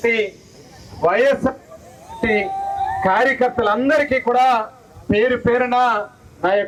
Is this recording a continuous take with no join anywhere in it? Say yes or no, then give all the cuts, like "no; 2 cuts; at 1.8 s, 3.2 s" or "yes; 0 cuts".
yes; 0 cuts